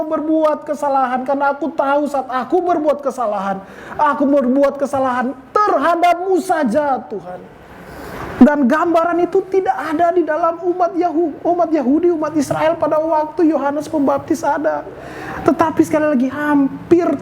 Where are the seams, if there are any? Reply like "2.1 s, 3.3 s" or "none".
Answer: none